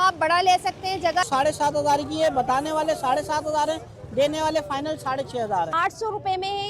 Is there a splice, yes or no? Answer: yes